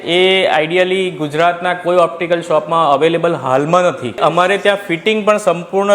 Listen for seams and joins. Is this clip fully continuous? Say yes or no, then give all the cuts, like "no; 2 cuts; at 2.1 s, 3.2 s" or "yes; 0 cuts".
no; 1 cut; at 4.2 s